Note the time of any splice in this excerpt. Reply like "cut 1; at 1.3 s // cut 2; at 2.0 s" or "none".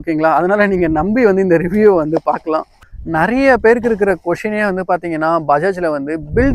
cut 1; at 2.7 s